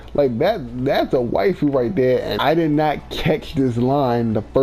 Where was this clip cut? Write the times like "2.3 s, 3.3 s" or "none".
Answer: 2.3 s